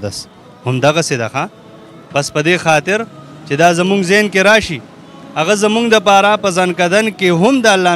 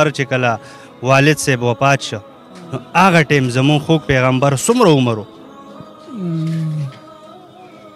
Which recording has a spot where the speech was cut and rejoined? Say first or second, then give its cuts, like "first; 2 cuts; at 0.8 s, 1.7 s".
second; 1 cut; at 6.9 s